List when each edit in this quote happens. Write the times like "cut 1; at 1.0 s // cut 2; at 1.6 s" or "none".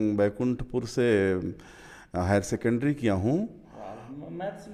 none